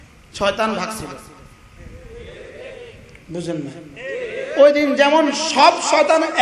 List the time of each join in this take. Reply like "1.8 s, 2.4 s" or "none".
none